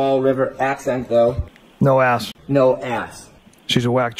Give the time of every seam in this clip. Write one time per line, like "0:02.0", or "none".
0:02.3